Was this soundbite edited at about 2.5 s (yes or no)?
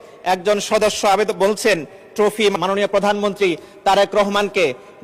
yes